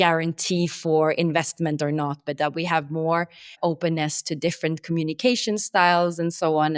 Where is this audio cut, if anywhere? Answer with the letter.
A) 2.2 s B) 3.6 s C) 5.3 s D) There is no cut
B